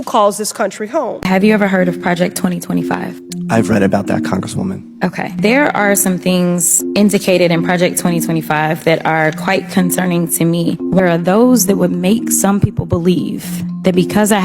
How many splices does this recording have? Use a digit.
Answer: 2